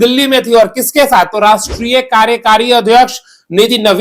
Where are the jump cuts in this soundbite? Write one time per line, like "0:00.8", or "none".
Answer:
none